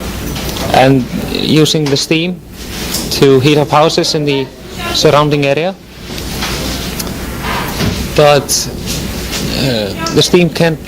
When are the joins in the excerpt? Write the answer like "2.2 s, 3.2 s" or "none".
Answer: 7.5 s